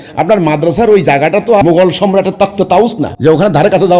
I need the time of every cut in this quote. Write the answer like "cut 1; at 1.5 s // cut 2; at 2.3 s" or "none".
cut 1; at 1.6 s // cut 2; at 3.1 s